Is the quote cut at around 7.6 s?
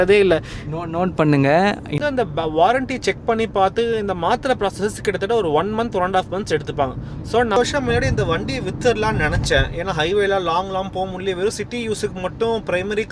yes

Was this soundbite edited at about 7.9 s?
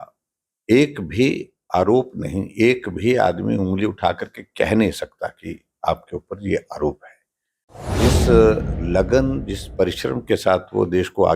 yes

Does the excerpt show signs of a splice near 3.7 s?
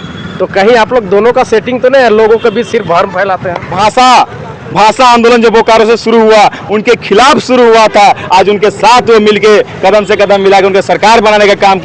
yes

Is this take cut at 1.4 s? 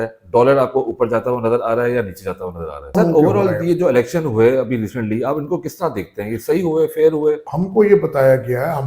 no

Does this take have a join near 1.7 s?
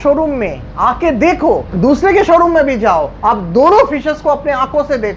yes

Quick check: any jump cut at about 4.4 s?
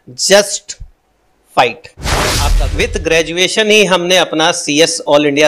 no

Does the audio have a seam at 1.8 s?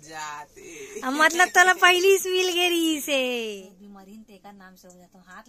no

